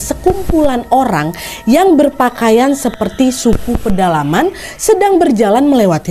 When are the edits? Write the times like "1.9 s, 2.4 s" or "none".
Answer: none